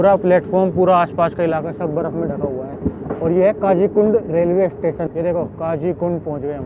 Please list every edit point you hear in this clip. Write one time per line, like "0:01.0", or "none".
0:05.1